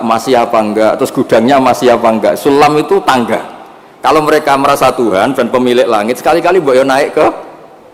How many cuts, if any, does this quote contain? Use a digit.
0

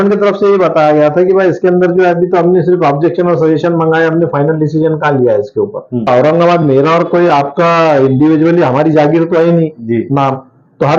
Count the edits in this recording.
1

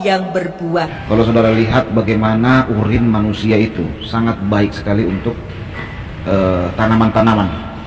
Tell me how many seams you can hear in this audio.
1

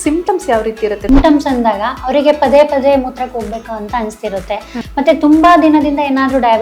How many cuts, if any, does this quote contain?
2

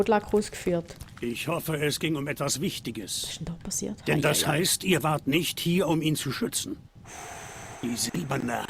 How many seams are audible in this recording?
1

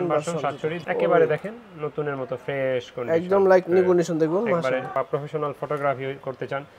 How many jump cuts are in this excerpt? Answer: 2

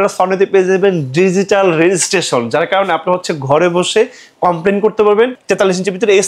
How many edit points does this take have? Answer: 1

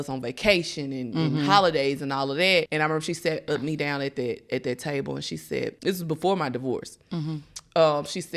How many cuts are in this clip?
2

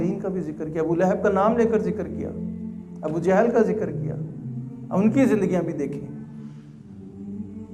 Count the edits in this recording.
0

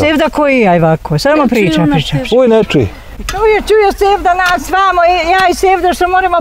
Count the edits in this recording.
1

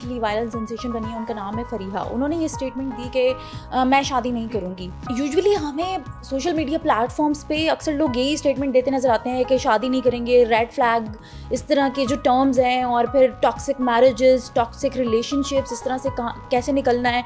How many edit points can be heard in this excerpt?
1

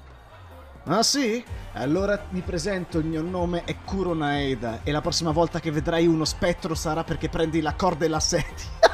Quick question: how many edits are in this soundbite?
0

